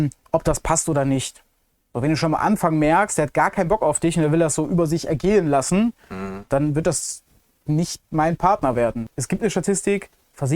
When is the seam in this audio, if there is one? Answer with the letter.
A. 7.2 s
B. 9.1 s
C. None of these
B